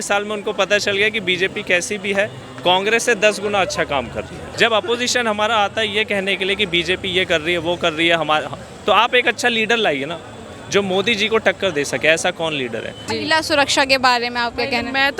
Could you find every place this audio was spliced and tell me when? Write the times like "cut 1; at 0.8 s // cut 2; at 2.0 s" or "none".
cut 1; at 4.4 s // cut 2; at 13.1 s